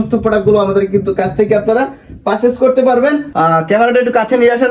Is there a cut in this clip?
yes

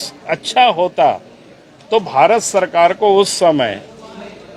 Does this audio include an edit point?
no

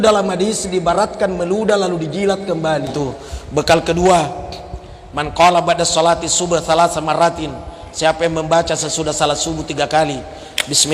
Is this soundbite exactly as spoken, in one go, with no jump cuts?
no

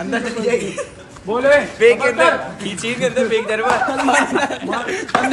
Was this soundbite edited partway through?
yes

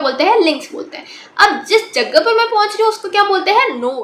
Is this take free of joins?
yes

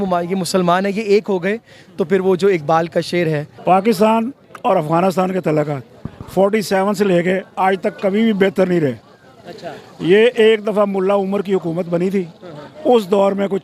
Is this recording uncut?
no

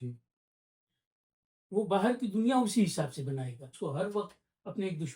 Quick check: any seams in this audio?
yes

